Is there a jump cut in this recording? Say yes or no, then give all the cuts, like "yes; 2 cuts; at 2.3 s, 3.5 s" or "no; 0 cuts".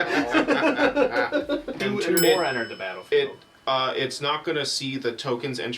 yes; 1 cut; at 1.7 s